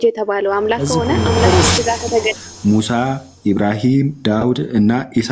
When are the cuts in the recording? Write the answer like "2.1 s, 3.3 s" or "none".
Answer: 2.4 s